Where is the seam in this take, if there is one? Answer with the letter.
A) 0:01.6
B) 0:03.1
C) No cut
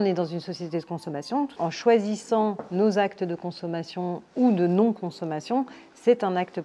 A